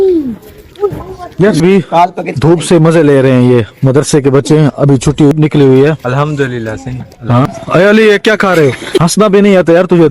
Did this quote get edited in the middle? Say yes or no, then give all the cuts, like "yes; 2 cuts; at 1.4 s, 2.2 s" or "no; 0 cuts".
yes; 4 cuts; at 1.6 s, 5.3 s, 7.4 s, 9.0 s